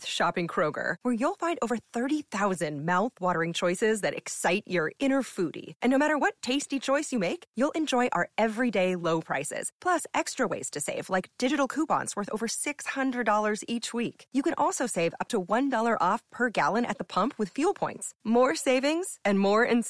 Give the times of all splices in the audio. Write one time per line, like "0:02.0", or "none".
none